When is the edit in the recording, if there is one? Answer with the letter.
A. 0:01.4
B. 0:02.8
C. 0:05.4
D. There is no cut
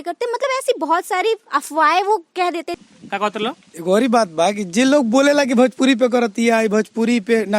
B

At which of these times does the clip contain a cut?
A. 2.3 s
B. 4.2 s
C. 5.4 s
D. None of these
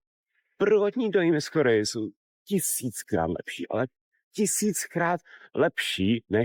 D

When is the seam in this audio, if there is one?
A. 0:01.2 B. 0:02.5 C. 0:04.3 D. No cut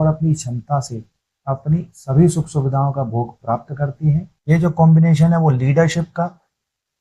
C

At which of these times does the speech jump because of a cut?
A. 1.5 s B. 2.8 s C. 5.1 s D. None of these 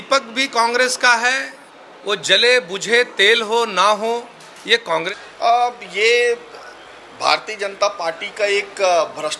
C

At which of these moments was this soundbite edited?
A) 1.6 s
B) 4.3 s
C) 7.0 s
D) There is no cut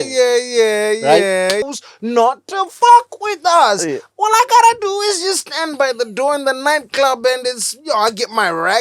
A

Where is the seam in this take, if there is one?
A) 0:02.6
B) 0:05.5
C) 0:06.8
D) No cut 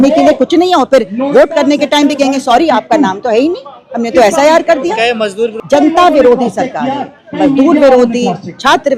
B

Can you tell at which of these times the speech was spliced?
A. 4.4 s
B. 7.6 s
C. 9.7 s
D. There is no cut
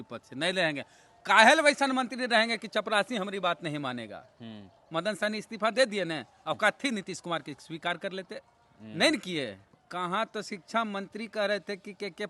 C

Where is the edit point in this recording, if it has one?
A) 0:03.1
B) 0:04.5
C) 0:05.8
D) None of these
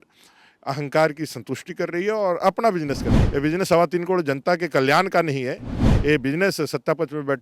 A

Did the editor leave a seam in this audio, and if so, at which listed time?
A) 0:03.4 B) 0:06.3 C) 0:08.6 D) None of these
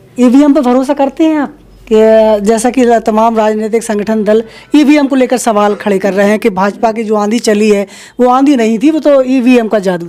D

